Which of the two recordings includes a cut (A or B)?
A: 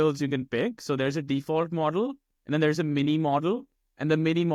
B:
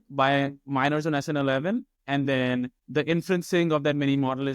B